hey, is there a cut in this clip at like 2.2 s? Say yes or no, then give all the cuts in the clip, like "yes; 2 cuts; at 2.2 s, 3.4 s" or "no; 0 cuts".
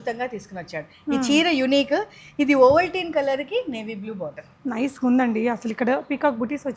no; 0 cuts